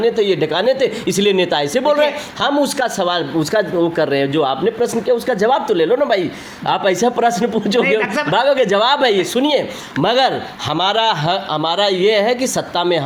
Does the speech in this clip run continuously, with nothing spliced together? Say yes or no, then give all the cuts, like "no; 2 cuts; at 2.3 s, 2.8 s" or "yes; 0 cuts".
yes; 0 cuts